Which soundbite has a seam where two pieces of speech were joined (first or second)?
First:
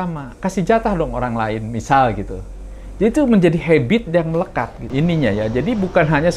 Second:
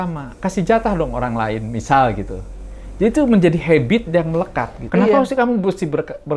second